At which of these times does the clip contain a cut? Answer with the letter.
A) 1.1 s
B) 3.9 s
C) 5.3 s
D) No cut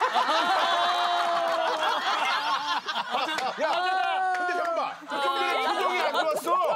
A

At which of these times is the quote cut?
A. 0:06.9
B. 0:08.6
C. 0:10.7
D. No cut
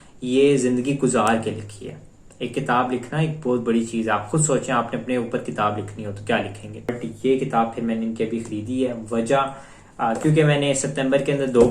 A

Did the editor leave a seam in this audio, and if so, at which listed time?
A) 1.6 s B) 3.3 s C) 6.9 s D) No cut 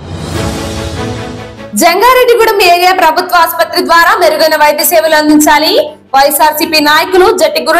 A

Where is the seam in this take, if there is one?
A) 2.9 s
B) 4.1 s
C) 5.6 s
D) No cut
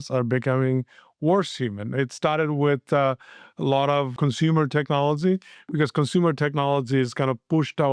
B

